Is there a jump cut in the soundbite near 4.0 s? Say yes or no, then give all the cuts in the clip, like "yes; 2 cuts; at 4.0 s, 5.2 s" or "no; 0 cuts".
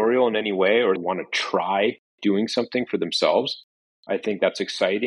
no; 1 cut; at 1.0 s